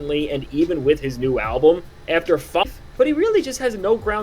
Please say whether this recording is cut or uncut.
cut